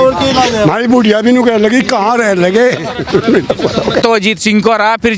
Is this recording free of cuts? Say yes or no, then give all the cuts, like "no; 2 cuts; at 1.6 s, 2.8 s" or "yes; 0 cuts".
no; 1 cut; at 4.0 s